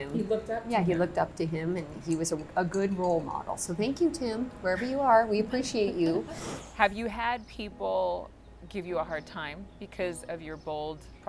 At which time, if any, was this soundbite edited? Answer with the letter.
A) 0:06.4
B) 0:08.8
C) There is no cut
A